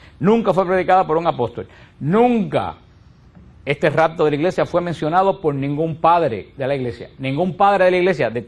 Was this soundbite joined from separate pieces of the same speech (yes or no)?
no